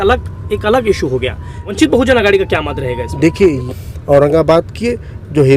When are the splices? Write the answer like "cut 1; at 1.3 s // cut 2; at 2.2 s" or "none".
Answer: cut 1; at 1.7 s // cut 2; at 3.7 s